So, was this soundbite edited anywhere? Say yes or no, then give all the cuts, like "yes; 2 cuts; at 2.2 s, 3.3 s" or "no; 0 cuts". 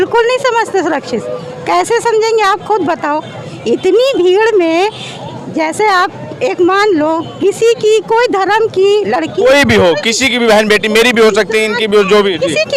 no; 0 cuts